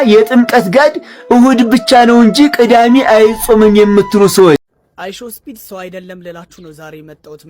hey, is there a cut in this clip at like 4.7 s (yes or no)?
yes